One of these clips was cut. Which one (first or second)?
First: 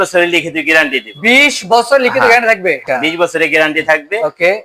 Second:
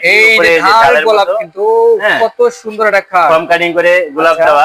first